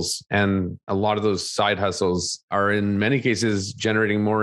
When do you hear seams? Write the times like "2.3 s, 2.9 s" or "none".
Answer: 2.4 s